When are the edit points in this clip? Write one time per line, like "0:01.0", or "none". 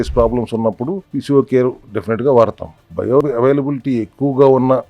0:01.1
0:01.9
0:03.0